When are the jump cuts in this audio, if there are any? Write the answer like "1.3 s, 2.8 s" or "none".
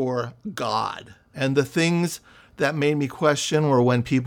1.2 s